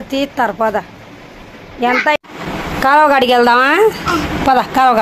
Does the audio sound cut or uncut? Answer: cut